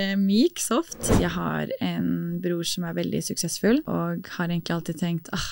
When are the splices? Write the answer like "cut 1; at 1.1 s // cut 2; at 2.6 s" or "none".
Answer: cut 1; at 1.0 s // cut 2; at 3.9 s

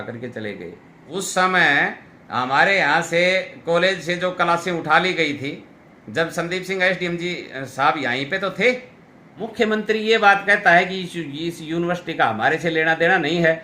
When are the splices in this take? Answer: cut 1; at 0.9 s // cut 2; at 9.4 s

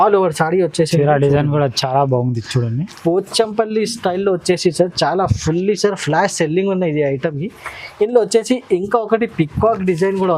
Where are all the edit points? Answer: none

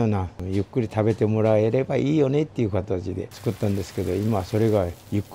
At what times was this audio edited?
cut 1; at 3.3 s

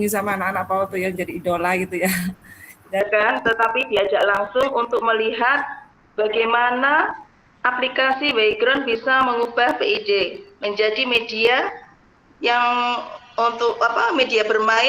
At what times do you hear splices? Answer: cut 1; at 3.0 s

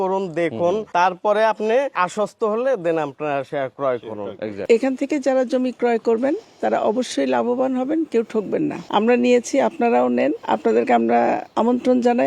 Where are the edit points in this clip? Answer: cut 1; at 0.9 s // cut 2; at 2.0 s // cut 3; at 4.6 s // cut 4; at 8.8 s // cut 5; at 10.4 s // cut 6; at 11.5 s

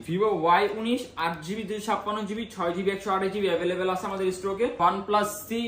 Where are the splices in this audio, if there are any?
cut 1; at 4.7 s

